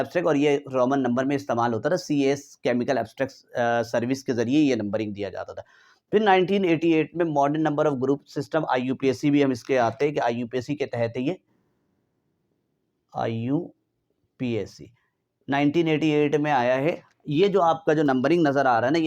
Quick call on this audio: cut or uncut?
uncut